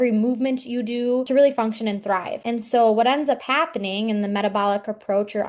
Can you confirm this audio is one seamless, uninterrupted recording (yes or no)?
yes